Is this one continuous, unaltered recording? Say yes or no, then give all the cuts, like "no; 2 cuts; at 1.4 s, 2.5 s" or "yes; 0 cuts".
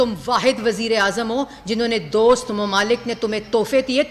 yes; 0 cuts